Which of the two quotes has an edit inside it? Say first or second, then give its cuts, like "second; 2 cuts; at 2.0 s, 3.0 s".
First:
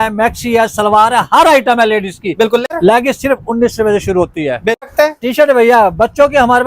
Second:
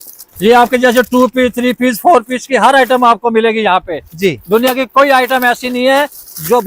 first; 2 cuts; at 2.7 s, 4.8 s